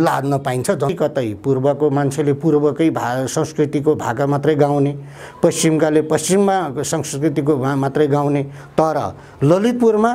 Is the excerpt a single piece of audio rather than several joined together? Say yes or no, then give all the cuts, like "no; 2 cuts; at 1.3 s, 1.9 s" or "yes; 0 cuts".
no; 1 cut; at 0.9 s